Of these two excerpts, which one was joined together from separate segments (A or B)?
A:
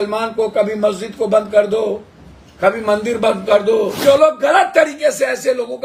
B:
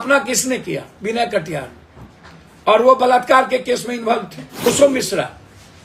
A